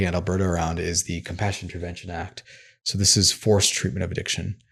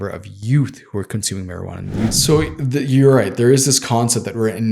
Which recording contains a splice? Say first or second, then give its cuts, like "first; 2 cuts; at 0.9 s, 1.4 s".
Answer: second; 1 cut; at 2.2 s